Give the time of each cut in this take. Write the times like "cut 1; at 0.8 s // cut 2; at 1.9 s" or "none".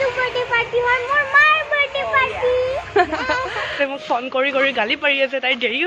cut 1; at 3.7 s